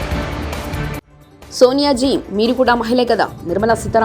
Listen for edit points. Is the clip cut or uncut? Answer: uncut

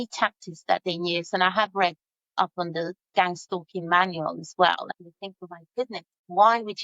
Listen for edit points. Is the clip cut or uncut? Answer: cut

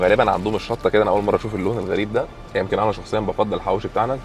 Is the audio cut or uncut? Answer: cut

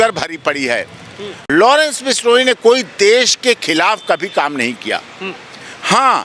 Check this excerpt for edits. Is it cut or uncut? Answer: cut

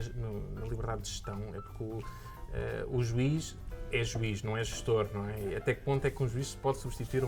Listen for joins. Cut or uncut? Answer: uncut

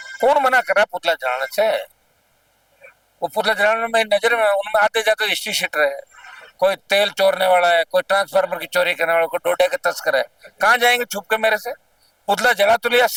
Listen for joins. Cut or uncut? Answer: uncut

